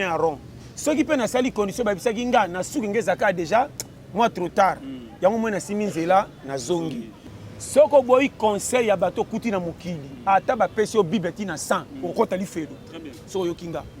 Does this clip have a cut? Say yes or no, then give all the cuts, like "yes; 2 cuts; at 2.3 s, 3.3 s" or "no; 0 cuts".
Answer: yes; 1 cut; at 7.3 s